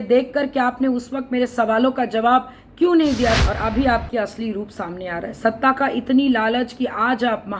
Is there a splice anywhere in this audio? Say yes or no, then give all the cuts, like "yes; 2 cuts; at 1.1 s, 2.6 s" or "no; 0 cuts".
yes; 1 cut; at 3.4 s